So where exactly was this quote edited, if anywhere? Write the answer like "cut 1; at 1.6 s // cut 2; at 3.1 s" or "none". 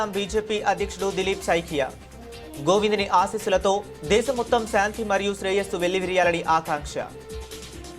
cut 1; at 7.1 s